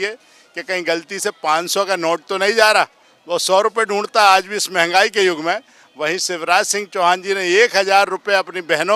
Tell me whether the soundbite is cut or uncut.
uncut